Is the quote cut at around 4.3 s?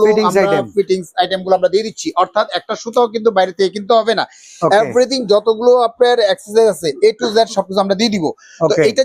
no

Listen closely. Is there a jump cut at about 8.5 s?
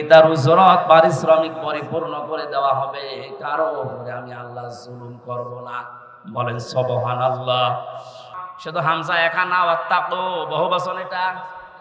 yes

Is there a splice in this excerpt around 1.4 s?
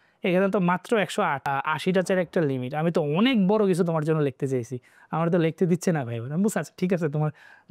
yes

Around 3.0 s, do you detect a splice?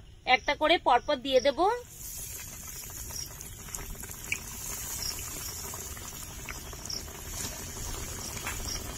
no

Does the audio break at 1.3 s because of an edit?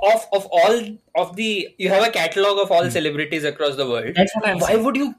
no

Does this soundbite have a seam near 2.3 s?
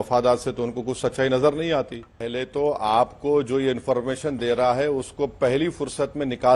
yes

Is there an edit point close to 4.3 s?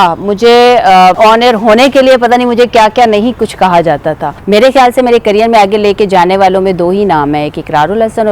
yes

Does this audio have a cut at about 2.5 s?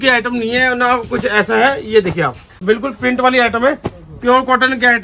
yes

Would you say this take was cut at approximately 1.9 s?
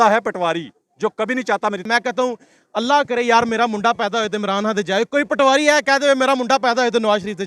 yes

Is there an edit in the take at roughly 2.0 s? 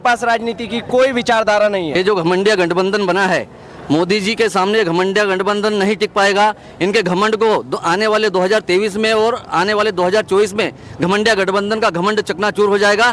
yes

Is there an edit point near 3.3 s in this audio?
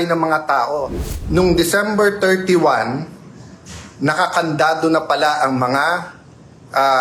no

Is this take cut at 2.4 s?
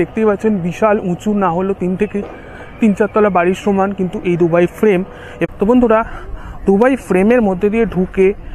no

